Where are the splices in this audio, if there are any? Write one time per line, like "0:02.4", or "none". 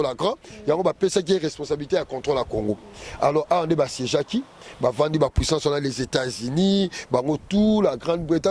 none